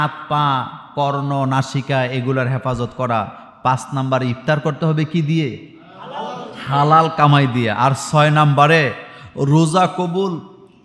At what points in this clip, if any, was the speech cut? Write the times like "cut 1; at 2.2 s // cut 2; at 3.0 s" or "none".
none